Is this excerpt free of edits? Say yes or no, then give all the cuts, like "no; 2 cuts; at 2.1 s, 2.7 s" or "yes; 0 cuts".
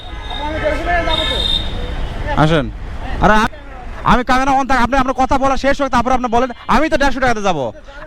no; 1 cut; at 3.5 s